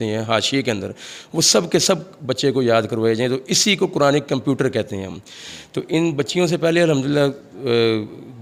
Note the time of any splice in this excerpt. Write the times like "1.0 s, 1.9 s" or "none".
none